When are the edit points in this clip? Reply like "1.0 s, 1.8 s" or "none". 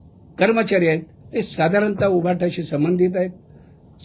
none